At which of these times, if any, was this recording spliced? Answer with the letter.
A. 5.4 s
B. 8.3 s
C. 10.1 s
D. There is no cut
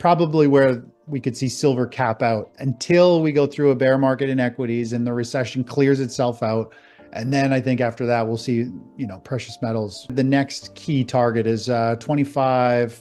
C